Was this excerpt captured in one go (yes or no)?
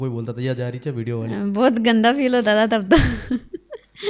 yes